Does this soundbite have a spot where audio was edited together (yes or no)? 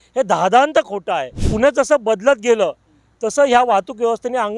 yes